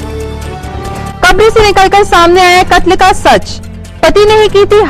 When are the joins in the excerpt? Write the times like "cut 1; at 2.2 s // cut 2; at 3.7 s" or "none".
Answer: cut 1; at 0.9 s